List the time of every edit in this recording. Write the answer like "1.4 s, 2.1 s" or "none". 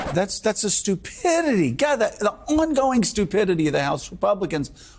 none